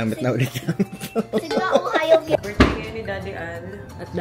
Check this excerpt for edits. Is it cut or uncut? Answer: cut